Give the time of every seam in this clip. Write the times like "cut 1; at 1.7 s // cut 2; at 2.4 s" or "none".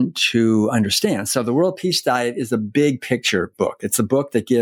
none